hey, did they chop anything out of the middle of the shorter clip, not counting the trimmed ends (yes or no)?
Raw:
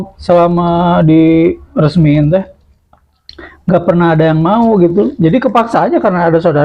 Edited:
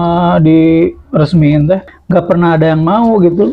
yes